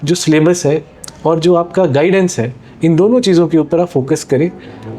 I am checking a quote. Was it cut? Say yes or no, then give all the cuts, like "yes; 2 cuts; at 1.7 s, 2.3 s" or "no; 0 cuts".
no; 0 cuts